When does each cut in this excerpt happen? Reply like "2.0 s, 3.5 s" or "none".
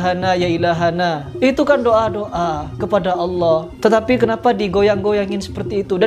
none